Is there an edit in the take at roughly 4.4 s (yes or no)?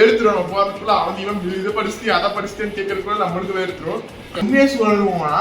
yes